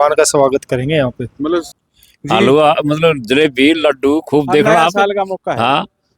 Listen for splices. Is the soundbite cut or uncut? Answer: cut